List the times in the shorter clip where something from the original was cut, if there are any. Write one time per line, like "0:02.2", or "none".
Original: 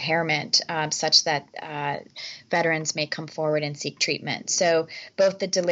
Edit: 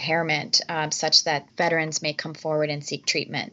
0:01.5